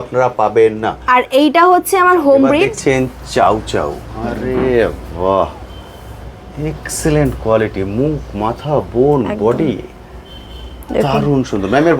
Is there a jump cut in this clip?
yes; 1 cut; at 2.7 s

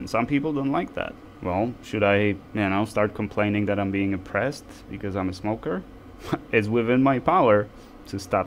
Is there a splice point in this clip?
yes; 2 cuts; at 1.2 s, 2.4 s

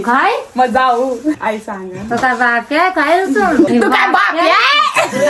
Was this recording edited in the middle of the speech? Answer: yes; 2 cuts; at 1.4 s, 3.7 s

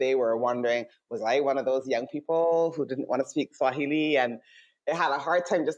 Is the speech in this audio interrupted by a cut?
no; 0 cuts

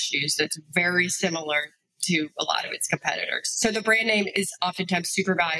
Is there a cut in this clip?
no; 0 cuts

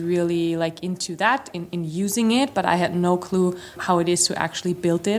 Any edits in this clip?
yes; 1 cut; at 3.8 s

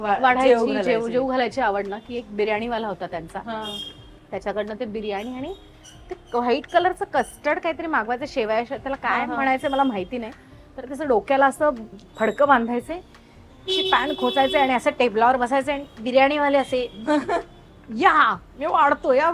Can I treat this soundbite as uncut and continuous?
yes; 0 cuts

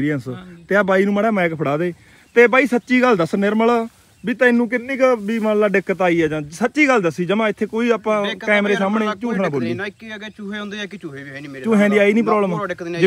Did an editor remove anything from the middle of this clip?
no; 0 cuts

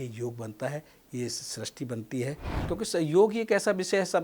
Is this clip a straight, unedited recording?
no; 1 cut; at 2.5 s

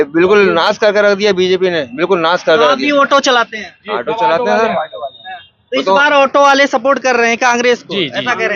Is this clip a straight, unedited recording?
yes; 0 cuts

